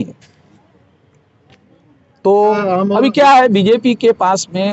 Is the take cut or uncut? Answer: cut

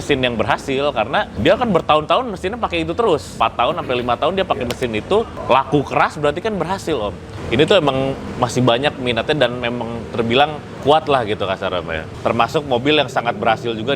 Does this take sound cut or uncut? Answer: cut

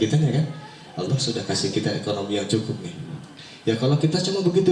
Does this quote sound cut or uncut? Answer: uncut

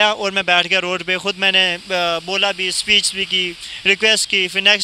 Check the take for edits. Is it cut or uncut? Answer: uncut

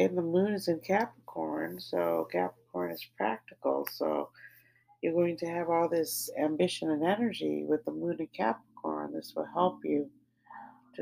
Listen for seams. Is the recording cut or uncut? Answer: uncut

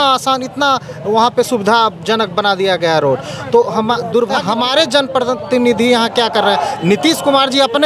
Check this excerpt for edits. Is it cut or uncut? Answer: cut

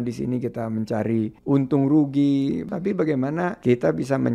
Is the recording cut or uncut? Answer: cut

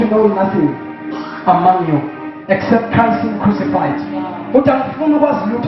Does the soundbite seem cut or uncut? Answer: uncut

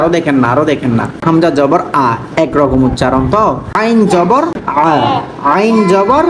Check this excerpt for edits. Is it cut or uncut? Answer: cut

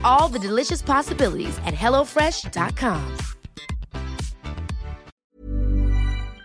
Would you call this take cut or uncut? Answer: cut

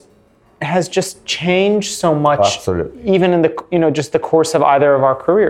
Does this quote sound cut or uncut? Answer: uncut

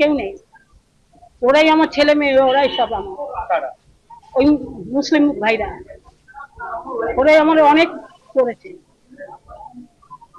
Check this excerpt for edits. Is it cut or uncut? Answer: uncut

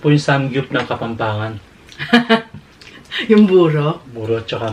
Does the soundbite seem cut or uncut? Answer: uncut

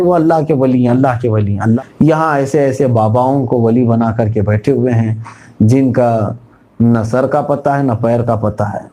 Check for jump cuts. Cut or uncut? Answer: cut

